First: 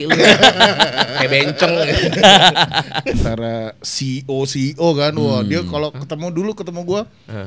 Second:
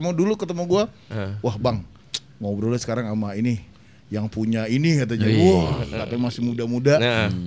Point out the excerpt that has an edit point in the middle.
first; 1 cut; at 3.1 s

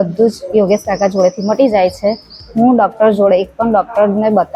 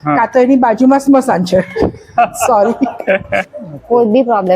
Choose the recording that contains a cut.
second; 1 cut; at 3.4 s

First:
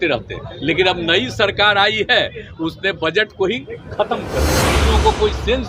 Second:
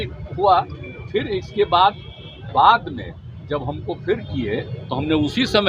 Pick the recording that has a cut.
first; 1 cut; at 4.8 s

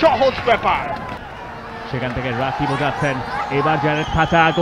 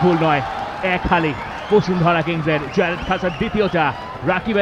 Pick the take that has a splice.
first; 1 cut; at 1.1 s

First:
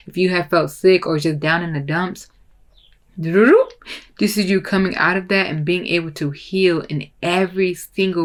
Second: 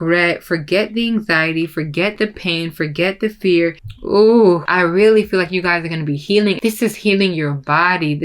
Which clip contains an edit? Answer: second; 3 cuts; at 3.9 s, 4.7 s, 6.6 s

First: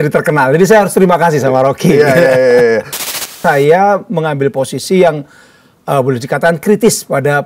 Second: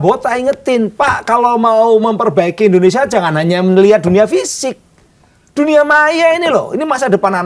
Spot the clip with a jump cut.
first; 1 cut; at 3.3 s

